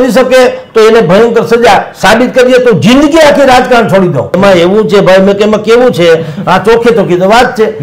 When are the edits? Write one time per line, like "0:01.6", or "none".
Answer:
0:04.4